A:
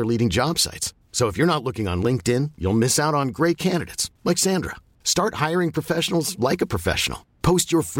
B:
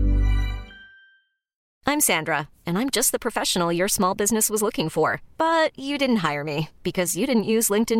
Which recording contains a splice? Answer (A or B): B